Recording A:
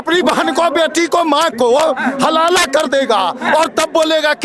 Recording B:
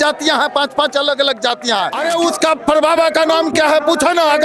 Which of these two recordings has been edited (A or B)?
B